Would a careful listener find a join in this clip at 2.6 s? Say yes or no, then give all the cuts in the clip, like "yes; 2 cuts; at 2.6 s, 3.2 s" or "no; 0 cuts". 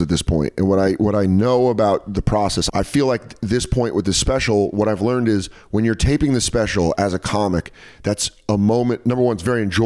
yes; 1 cut; at 2.6 s